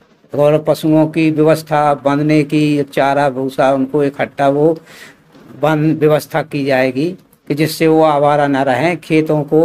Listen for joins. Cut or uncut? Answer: uncut